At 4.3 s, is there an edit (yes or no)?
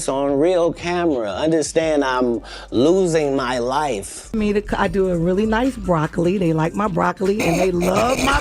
yes